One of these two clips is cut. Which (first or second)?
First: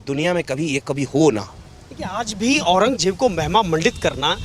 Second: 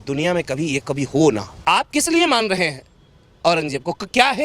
second